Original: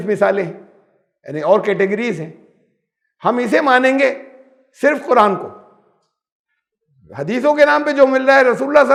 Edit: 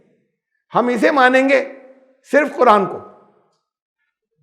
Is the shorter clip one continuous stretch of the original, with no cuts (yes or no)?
yes